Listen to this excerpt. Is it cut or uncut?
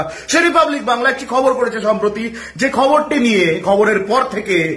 uncut